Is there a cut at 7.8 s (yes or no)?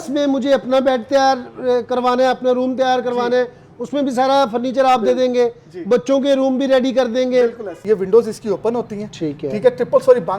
yes